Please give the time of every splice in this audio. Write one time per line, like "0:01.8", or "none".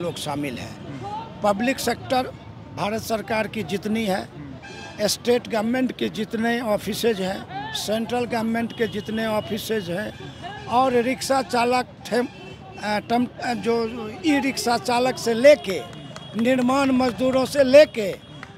none